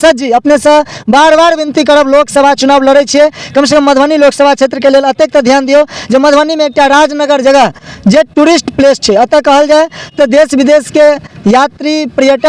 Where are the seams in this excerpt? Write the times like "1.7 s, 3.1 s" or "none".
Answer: none